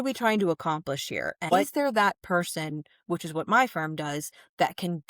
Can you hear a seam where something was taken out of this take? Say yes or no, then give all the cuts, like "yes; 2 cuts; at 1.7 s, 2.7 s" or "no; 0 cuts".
yes; 1 cut; at 1.5 s